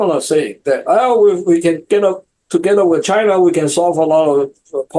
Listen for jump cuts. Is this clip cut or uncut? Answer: uncut